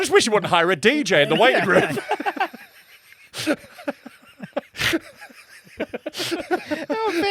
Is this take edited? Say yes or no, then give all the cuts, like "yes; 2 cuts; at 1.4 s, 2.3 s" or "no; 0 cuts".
no; 0 cuts